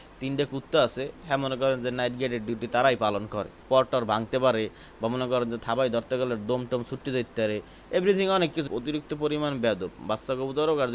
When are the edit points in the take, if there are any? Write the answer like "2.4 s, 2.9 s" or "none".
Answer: 3.6 s, 8.7 s